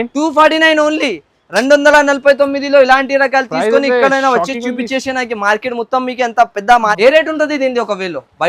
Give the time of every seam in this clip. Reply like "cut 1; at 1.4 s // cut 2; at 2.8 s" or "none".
cut 1; at 7.0 s